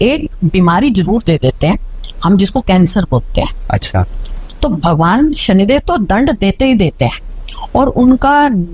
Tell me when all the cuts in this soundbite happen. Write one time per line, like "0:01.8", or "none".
0:04.4